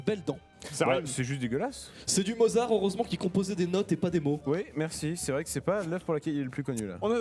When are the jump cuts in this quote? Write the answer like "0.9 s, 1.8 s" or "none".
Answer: none